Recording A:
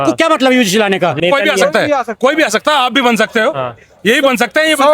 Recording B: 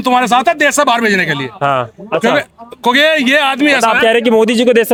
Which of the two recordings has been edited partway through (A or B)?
A